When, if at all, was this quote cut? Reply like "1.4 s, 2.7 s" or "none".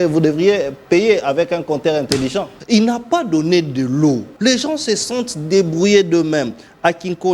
2.5 s, 4.3 s